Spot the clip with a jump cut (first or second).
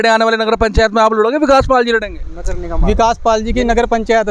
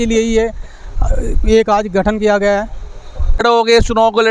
second